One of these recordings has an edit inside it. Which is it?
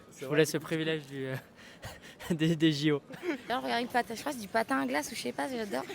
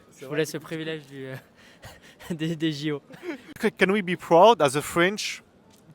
first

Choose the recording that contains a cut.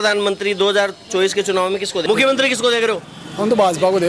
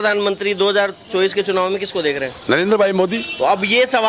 first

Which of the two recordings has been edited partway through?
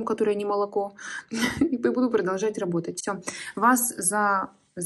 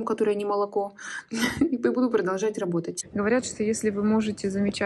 second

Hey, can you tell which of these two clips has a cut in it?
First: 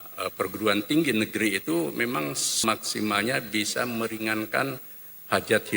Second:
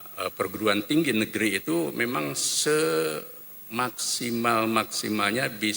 first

